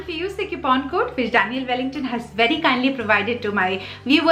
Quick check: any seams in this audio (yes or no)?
no